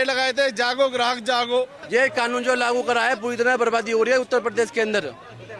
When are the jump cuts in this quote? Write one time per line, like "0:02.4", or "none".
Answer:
0:01.8